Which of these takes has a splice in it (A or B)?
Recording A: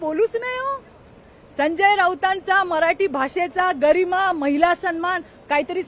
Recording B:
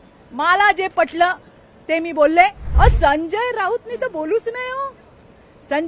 B